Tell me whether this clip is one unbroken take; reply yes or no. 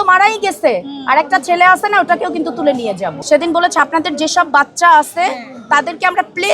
no